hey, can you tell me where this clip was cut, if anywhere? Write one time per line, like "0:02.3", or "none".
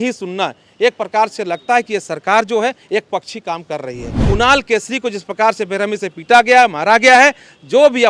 0:04.1